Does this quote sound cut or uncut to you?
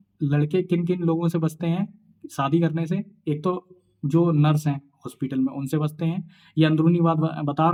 uncut